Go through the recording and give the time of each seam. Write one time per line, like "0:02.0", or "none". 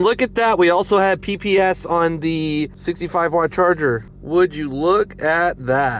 0:02.8
0:04.1